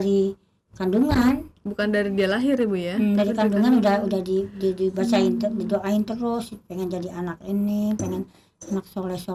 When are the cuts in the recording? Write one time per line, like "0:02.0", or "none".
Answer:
none